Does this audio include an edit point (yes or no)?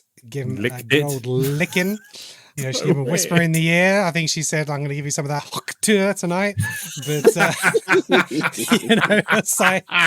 yes